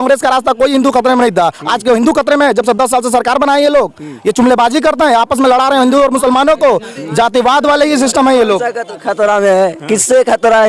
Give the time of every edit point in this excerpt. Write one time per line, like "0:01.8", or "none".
none